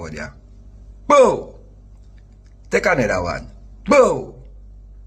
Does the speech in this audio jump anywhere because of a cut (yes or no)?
no